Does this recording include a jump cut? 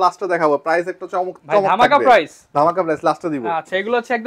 no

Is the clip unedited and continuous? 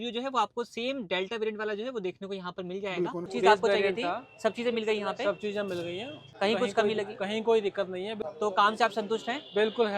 no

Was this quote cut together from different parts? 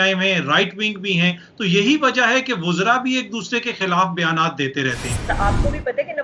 yes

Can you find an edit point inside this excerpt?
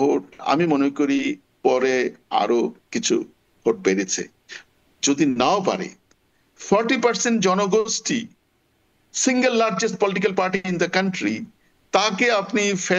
no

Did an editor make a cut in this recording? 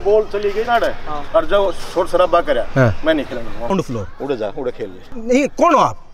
yes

